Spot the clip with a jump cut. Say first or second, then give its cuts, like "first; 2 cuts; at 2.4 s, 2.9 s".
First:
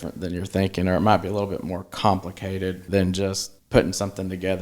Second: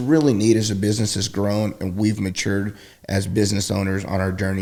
first; 2 cuts; at 2.8 s, 3.5 s